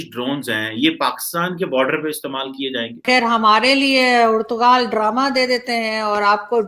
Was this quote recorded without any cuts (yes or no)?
no